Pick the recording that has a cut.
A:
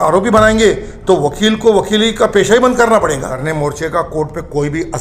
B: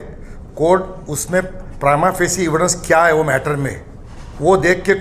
A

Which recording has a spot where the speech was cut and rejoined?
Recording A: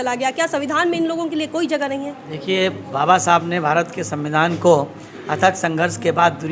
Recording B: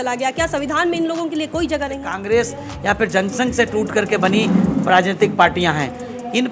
B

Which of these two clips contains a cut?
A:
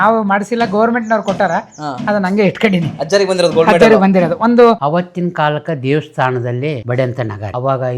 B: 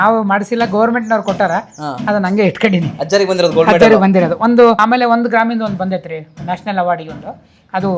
A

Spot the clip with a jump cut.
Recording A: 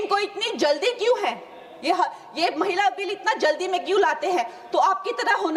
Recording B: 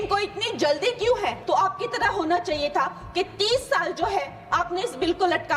B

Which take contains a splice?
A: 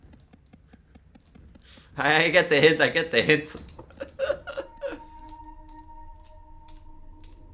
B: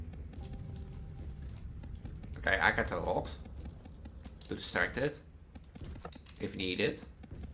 A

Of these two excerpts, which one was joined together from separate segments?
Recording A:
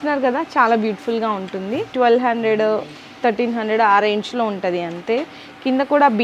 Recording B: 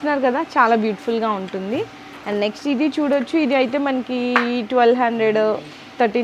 A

